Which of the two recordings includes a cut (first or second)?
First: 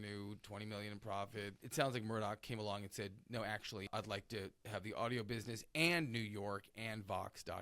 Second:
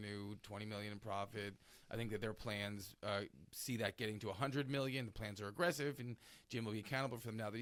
first